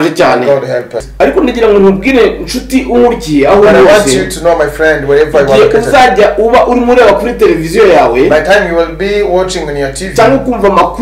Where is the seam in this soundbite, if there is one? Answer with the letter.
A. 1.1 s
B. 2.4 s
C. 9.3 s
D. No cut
A